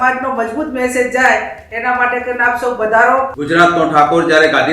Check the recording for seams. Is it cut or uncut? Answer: cut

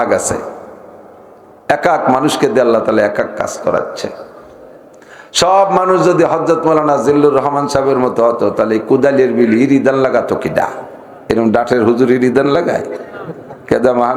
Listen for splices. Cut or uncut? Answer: uncut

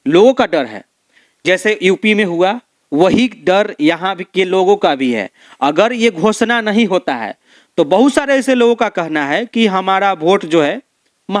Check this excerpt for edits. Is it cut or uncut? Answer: uncut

